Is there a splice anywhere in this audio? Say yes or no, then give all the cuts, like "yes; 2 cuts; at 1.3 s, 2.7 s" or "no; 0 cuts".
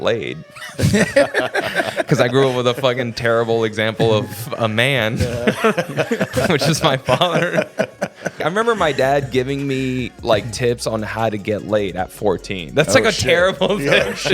yes; 1 cut; at 8.4 s